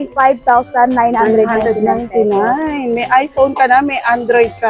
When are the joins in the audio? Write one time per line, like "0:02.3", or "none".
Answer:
none